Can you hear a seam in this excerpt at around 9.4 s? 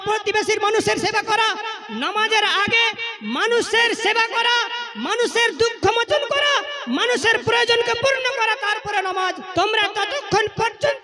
yes; 1 cut; at 9.4 s

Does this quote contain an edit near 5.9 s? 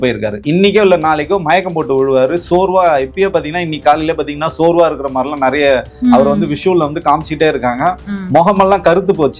no; 0 cuts

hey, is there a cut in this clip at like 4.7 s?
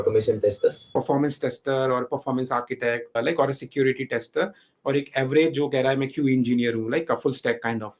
no; 2 cuts; at 0.9 s, 3.2 s

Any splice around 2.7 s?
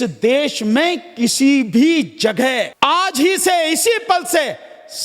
yes; 1 cut; at 2.7 s

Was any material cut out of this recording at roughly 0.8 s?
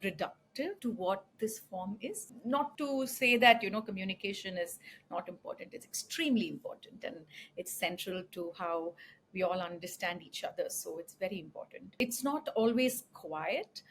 yes; 3 cuts; at 0.8 s, 2.6 s, 12.0 s

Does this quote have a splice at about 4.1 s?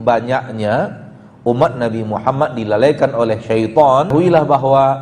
yes; 1 cut; at 4.1 s

